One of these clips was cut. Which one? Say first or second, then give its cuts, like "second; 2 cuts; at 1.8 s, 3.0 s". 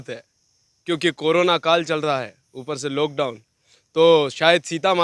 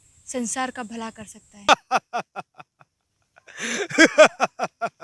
second; 1 cut; at 1.7 s